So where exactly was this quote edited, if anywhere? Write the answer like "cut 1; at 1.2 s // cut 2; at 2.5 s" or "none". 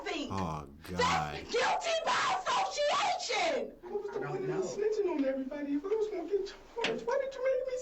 cut 1; at 3.9 s